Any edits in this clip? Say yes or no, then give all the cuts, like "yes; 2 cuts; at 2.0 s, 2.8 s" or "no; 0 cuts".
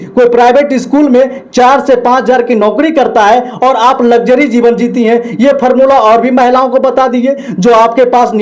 no; 0 cuts